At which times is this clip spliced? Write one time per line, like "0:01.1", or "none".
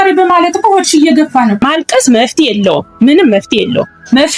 0:01.6